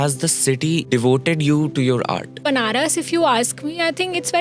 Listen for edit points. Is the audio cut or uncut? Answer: cut